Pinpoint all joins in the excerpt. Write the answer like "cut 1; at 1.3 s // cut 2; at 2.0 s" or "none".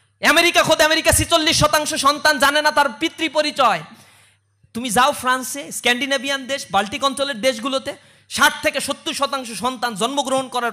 none